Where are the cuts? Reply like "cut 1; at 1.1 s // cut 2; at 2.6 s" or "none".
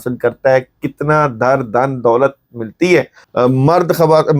cut 1; at 3.2 s